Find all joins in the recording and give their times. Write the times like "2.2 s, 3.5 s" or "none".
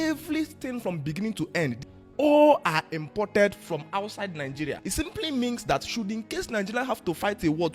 1.9 s, 4.8 s